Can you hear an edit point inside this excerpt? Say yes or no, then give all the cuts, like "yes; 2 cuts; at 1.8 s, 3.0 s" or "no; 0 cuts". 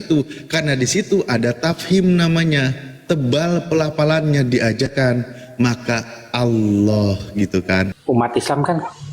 yes; 1 cut; at 8.0 s